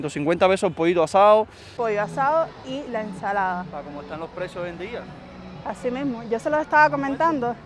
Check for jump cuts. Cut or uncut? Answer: cut